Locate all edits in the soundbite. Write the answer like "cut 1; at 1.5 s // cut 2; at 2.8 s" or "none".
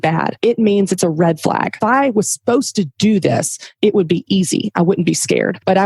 cut 1; at 1.8 s